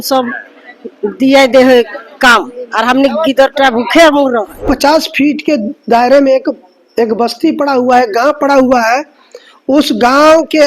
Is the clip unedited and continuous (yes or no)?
no